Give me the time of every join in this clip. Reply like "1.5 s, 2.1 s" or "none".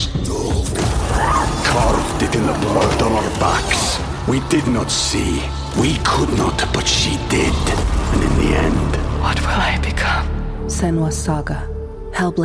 none